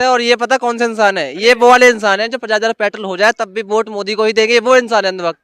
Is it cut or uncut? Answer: uncut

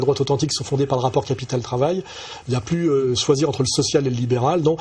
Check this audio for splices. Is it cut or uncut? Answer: cut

